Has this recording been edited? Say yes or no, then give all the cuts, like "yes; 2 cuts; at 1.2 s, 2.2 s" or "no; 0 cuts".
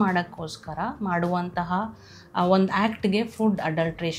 no; 0 cuts